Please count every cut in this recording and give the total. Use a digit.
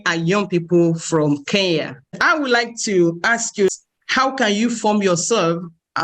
2